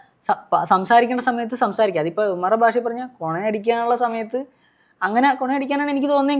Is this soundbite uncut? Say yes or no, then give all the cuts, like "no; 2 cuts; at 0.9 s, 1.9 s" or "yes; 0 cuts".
yes; 0 cuts